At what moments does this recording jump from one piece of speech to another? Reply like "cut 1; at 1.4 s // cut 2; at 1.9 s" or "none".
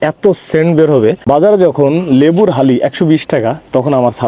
cut 1; at 1.2 s